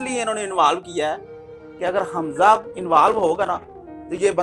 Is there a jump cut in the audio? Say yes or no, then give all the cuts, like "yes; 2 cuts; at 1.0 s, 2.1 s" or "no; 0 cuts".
no; 0 cuts